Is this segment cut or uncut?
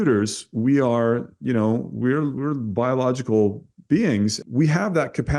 cut